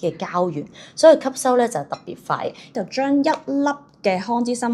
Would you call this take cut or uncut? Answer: cut